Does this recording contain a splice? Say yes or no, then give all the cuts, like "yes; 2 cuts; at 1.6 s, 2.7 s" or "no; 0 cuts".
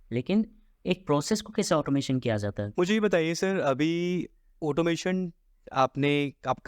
yes; 1 cut; at 2.6 s